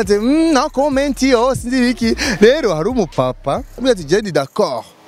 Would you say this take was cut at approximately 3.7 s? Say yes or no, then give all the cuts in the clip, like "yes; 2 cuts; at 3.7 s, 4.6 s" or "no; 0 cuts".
yes; 1 cut; at 3.7 s